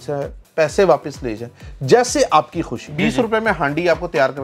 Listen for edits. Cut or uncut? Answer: cut